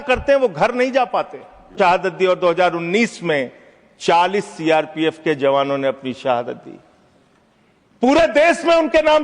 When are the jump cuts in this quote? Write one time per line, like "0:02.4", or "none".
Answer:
0:01.7